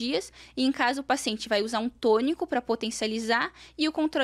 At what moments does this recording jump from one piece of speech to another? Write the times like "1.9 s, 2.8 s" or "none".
none